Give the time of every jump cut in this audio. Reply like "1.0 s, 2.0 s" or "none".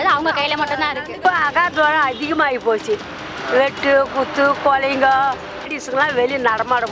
1.1 s, 5.8 s